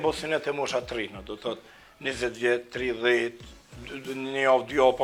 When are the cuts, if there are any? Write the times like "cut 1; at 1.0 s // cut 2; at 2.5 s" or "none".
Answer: none